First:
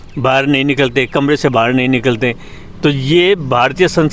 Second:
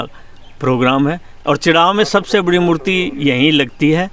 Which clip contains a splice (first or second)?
second